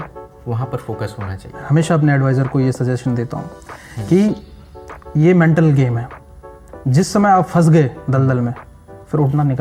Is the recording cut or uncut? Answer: uncut